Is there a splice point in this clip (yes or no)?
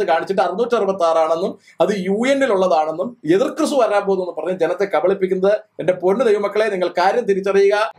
no